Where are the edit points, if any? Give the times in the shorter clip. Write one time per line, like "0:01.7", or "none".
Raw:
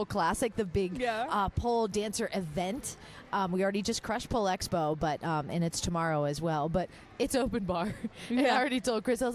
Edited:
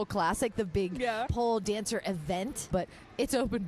0:01.3
0:02.7